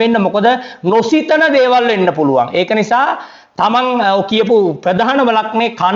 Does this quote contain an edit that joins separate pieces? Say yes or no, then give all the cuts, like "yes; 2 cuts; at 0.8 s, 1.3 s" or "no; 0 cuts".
no; 0 cuts